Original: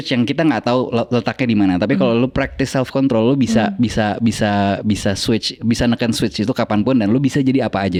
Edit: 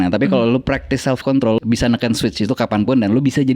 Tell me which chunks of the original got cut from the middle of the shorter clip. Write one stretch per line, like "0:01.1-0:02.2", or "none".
0:03.3-0:05.6